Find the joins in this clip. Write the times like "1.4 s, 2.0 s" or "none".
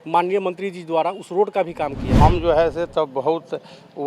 2.2 s

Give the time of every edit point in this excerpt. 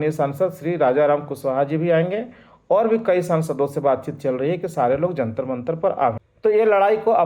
6.3 s

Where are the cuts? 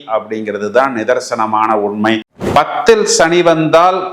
2.2 s

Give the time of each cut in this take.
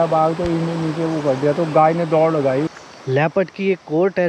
2.7 s

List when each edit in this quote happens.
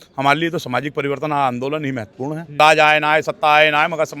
2.5 s

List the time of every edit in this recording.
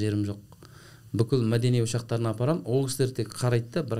none

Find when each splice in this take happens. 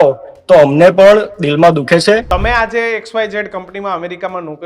2.2 s

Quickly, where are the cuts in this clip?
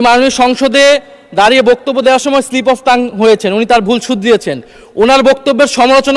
none

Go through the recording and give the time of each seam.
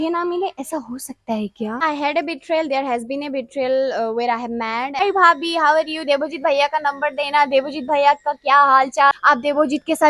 1.8 s, 5.0 s, 9.1 s

